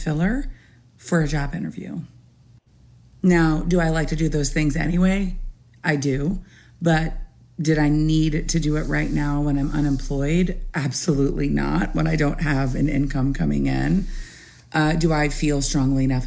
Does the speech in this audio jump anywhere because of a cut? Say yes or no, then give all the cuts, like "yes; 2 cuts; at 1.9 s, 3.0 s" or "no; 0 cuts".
no; 0 cuts